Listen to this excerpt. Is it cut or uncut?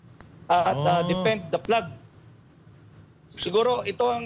uncut